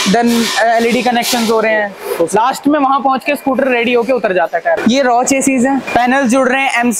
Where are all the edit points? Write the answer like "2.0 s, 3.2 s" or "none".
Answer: 4.8 s, 5.9 s